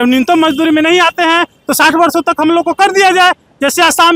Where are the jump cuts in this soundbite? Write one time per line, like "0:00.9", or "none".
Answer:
none